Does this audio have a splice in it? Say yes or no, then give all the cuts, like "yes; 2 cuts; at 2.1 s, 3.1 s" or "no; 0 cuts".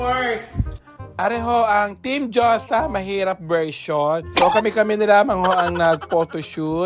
no; 0 cuts